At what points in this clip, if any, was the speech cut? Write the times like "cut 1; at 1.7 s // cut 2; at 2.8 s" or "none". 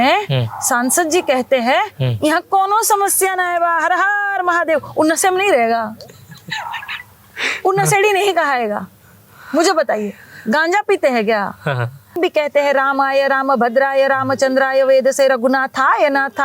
cut 1; at 12.1 s